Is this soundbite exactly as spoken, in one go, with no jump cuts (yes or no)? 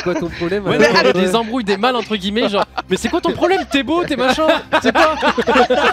no